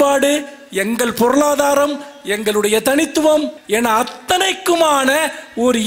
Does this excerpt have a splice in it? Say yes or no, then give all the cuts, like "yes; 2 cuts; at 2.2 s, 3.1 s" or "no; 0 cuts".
yes; 1 cut; at 3.6 s